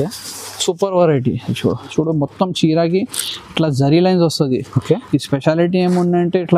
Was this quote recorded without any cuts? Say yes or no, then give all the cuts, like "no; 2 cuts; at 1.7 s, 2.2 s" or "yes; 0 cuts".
no; 1 cut; at 1.9 s